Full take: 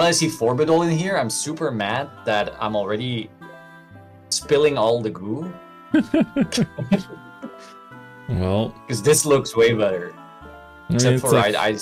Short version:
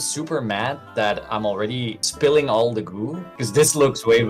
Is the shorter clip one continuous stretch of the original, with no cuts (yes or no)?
no